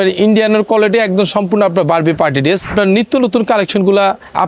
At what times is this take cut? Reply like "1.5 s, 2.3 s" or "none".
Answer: 2.7 s